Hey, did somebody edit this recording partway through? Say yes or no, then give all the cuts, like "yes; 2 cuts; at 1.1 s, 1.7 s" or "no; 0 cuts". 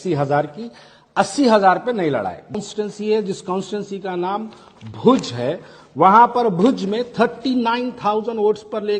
yes; 1 cut; at 2.5 s